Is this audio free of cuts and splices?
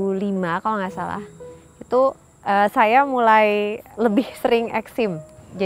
no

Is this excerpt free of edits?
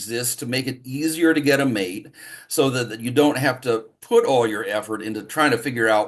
yes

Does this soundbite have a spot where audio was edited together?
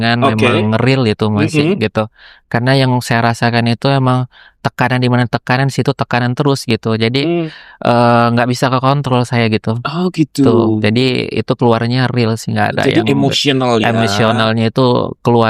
no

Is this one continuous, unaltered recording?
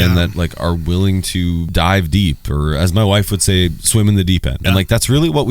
no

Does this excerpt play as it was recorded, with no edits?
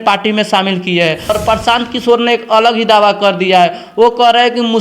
no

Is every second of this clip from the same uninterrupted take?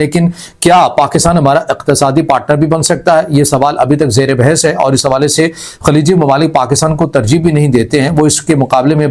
yes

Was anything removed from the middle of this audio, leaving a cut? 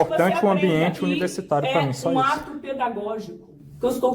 yes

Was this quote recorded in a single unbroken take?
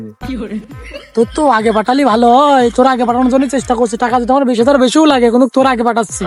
yes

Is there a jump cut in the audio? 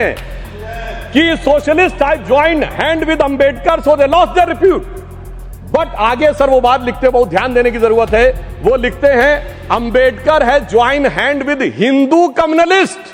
no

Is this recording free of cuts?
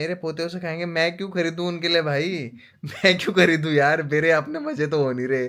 yes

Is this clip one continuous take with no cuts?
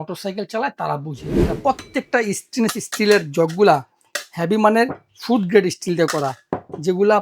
no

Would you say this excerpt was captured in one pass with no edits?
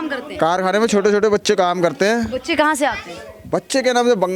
yes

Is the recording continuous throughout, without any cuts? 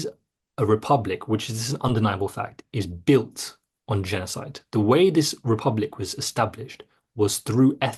yes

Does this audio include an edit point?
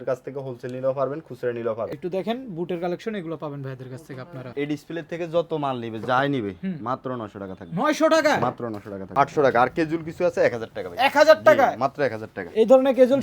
yes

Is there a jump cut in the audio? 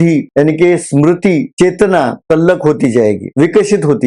no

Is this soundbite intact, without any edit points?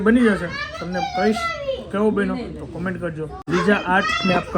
no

